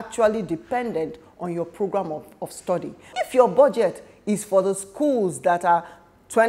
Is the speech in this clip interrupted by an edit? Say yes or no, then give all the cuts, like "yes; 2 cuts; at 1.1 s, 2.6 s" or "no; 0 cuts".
yes; 1 cut; at 3.1 s